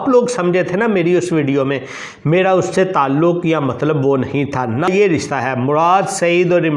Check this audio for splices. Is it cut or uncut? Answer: cut